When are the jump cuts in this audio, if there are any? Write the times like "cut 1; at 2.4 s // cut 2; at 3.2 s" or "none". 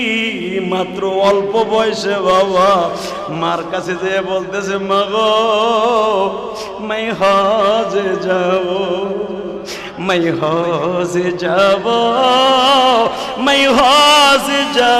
none